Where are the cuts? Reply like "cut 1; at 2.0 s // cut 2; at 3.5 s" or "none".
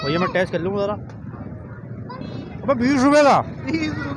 cut 1; at 2.2 s